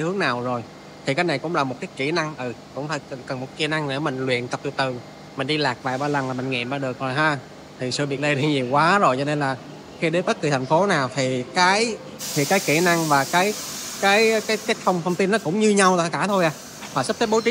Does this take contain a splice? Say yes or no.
no